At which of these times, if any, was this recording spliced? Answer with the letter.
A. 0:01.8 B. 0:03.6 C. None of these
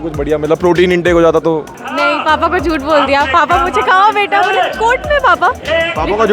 A